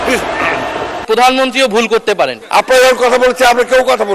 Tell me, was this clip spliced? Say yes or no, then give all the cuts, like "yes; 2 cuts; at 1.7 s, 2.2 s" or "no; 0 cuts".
yes; 2 cuts; at 1.0 s, 2.4 s